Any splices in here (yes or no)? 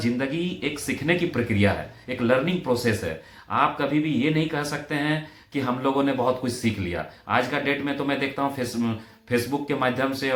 no